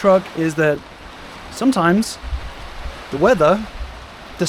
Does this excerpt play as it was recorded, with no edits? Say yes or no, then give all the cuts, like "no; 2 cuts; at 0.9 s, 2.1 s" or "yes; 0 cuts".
yes; 0 cuts